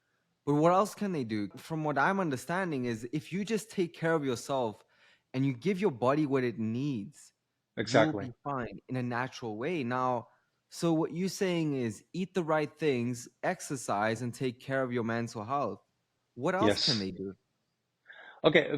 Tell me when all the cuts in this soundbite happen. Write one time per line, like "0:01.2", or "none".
0:01.6